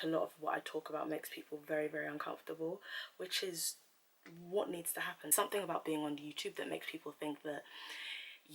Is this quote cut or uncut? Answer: cut